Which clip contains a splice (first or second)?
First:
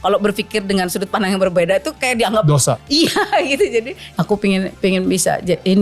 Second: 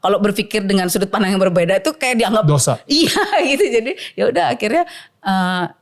first